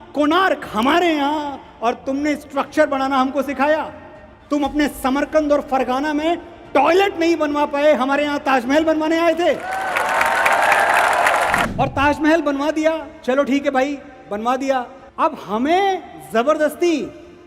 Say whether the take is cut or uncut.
cut